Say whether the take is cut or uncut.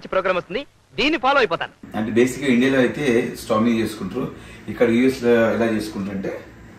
cut